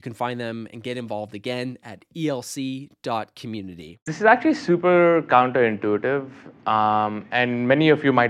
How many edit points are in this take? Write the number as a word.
one